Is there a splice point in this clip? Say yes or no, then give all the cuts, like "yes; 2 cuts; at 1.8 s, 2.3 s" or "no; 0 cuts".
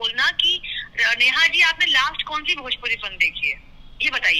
no; 0 cuts